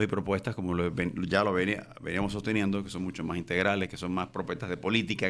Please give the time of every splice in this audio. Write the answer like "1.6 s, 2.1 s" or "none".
none